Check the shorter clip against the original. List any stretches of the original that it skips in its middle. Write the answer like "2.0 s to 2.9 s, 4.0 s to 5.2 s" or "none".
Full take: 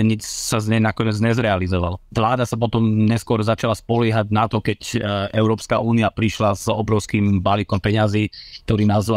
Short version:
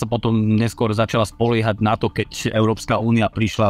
5.0 s to 5.3 s